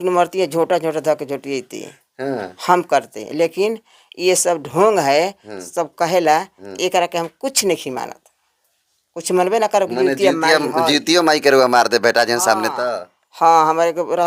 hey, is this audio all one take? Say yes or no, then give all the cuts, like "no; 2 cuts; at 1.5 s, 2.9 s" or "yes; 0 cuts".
yes; 0 cuts